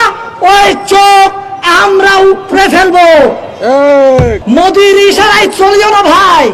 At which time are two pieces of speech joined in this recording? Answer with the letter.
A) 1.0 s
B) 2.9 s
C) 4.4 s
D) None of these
C